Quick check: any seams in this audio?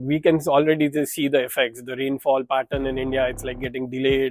no; 0 cuts

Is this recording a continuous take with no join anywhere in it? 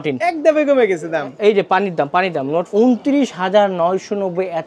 no; 1 cut; at 2.7 s

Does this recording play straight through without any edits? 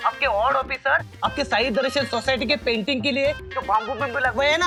yes; 0 cuts

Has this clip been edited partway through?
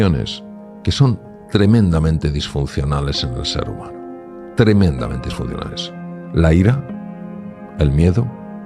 no; 0 cuts

